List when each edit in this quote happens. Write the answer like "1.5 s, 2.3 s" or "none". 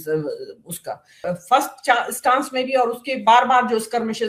1.1 s